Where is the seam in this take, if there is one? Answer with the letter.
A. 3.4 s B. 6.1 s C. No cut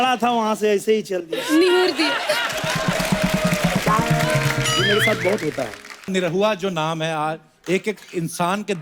B